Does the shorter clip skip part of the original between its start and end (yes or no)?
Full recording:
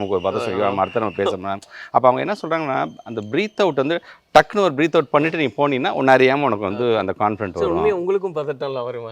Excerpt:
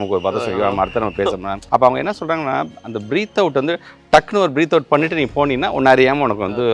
yes